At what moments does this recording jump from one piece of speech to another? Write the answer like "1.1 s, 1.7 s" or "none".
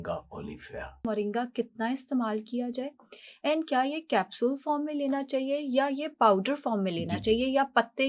1.0 s